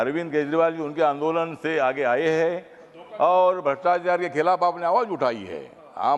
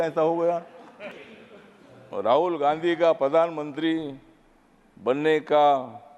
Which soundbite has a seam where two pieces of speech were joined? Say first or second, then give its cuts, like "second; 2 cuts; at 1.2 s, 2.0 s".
second; 1 cut; at 1.2 s